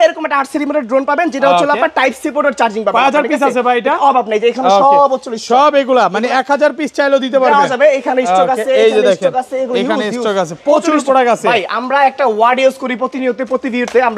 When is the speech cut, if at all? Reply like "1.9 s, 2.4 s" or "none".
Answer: none

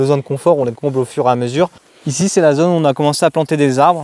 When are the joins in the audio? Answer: 1.9 s

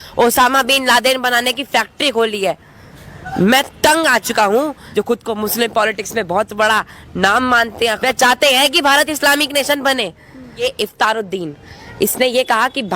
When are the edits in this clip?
4.8 s, 8.0 s, 10.6 s

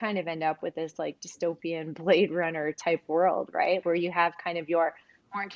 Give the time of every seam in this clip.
3.8 s

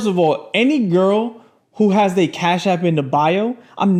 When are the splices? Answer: none

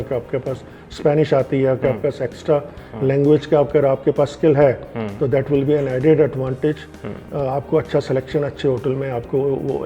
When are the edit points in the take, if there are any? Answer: none

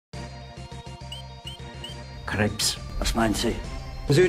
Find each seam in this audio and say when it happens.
2.2 s

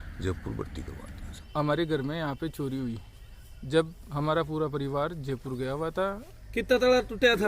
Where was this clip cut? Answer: 1.5 s, 6.3 s

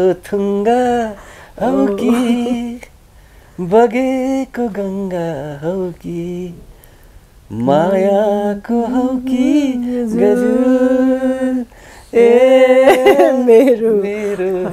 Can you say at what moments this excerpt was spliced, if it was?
none

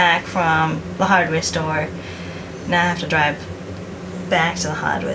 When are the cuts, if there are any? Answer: none

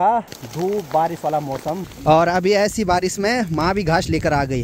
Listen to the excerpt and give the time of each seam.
1.9 s

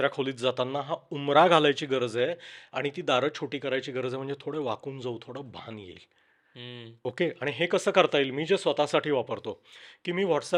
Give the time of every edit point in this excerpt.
none

